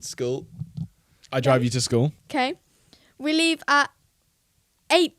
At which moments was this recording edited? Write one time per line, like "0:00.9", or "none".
0:02.2